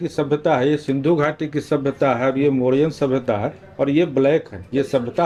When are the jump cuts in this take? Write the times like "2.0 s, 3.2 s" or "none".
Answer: none